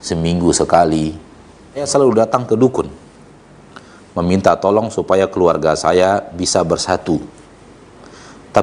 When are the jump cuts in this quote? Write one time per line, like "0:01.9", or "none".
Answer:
0:01.9